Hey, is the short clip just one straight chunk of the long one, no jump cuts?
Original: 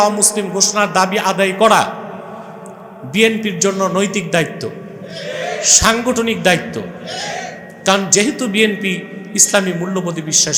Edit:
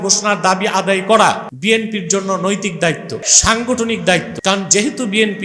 no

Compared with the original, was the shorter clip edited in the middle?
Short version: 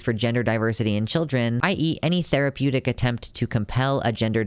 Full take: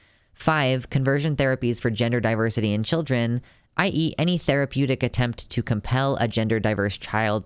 yes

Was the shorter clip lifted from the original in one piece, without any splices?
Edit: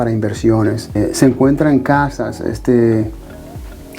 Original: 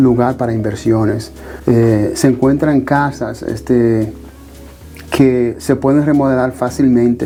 no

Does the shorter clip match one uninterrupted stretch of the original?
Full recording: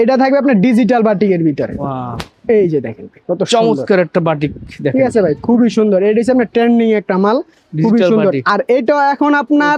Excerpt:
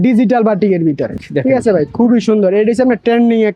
no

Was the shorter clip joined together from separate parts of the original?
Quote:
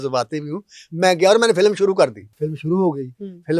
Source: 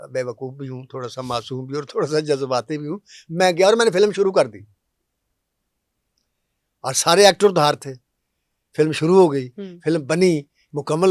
yes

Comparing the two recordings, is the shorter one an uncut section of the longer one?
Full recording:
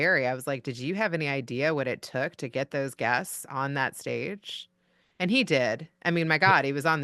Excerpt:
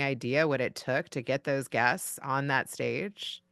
yes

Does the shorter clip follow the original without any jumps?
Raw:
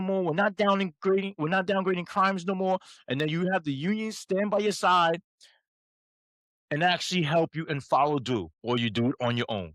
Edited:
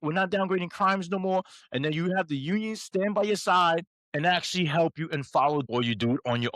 no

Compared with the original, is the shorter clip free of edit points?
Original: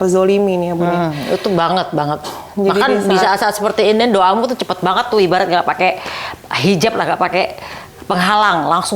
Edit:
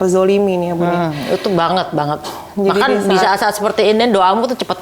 yes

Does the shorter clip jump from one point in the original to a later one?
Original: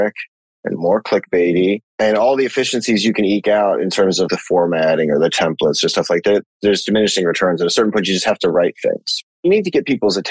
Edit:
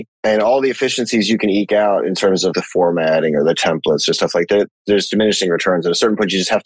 no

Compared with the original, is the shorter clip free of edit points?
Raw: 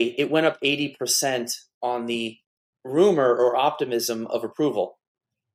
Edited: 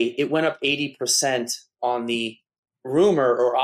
yes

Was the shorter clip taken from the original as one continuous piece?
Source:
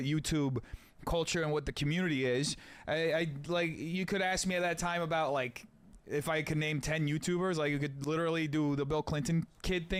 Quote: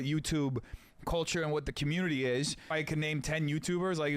no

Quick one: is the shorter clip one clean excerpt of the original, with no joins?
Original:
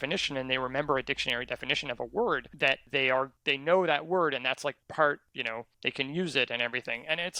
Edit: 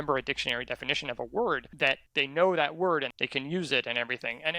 no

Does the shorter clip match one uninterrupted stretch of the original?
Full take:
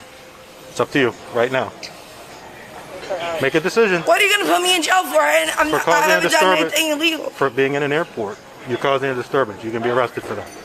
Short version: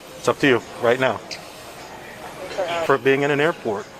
no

